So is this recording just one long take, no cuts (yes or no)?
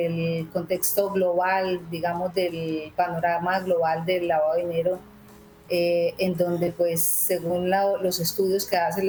yes